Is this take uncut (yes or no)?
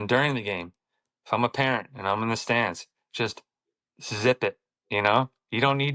yes